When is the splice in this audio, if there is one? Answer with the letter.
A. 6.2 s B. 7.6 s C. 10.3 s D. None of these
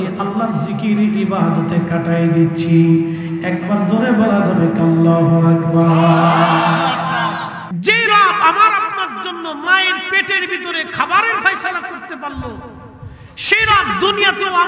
B